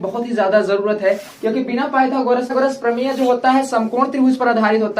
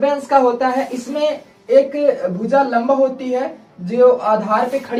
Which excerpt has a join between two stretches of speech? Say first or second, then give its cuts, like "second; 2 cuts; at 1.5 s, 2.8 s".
first; 1 cut; at 2.5 s